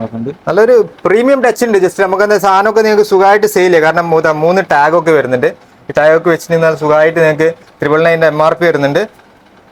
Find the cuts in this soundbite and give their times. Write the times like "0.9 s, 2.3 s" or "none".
none

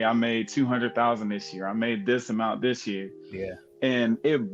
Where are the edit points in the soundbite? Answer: none

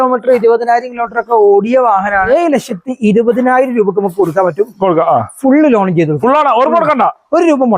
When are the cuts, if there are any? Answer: 2.3 s

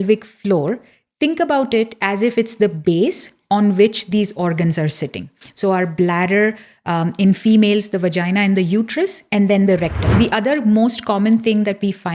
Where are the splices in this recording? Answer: 10.1 s

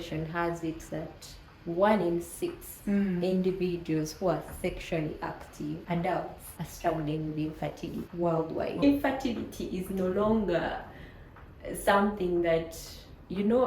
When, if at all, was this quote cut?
8.8 s

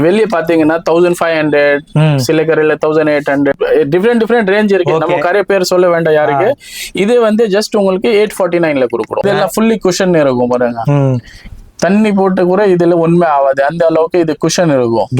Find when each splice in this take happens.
3.5 s, 9.2 s

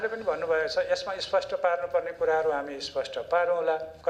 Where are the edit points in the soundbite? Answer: none

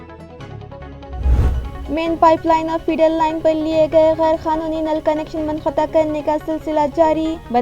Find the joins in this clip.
1.4 s

